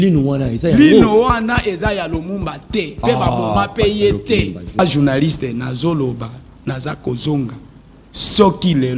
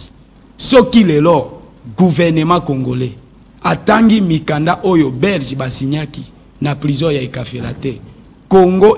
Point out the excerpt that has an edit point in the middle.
first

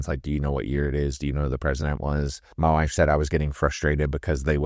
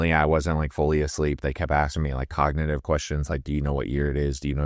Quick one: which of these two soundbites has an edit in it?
first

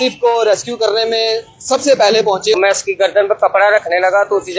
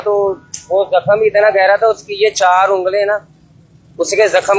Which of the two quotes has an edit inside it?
first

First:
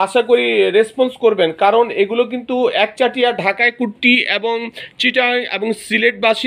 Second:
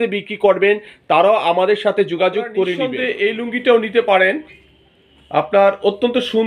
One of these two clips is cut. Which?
second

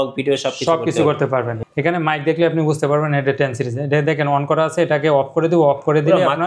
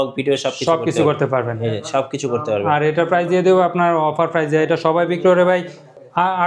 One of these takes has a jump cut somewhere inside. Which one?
first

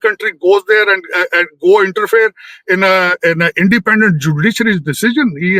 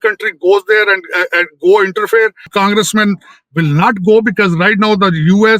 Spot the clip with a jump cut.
second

